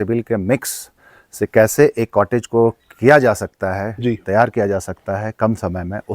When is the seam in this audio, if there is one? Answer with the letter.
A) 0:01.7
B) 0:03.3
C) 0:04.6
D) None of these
A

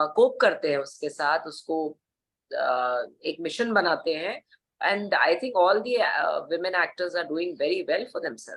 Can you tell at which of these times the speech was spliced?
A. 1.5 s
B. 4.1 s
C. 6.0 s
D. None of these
D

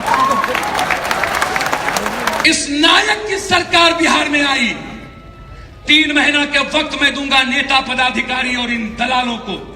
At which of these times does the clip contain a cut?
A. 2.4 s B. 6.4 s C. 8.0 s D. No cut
A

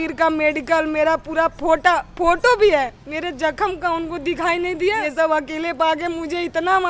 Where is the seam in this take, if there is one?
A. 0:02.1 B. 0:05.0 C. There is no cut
B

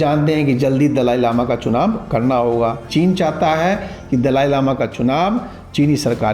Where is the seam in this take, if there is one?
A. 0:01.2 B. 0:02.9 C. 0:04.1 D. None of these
B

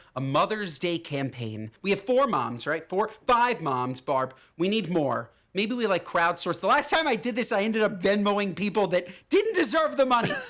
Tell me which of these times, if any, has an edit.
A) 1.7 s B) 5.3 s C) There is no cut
A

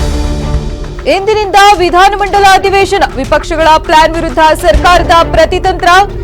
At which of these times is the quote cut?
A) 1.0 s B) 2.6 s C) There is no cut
A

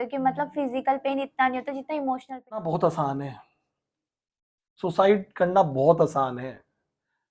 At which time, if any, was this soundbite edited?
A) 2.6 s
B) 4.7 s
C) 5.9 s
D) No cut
A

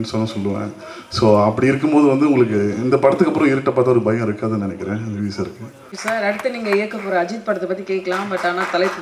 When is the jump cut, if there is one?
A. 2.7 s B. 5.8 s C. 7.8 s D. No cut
B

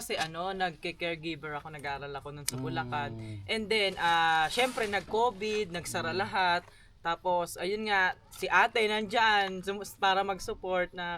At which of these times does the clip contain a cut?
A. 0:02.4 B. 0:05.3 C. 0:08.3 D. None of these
D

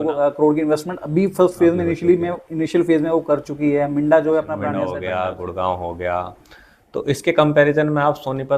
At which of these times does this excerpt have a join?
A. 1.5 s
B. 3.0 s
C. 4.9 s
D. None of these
C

